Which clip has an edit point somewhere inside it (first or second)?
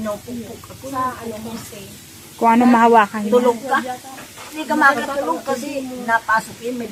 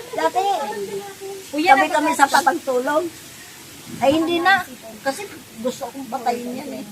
second